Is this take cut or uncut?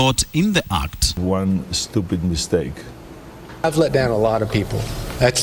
cut